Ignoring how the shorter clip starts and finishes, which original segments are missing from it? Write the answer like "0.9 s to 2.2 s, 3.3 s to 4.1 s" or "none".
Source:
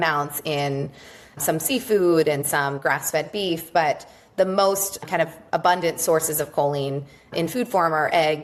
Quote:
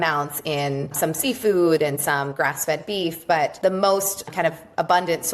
0.9 s to 1.3 s, 4.0 s to 4.3 s